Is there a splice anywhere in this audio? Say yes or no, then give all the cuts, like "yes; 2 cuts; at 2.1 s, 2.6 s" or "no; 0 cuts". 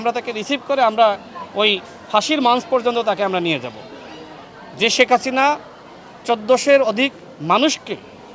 no; 0 cuts